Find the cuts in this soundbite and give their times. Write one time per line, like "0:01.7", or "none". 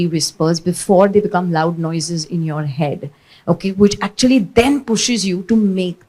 none